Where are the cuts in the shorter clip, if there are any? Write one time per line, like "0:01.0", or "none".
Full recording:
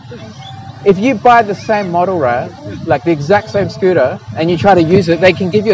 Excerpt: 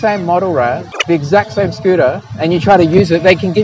0:01.0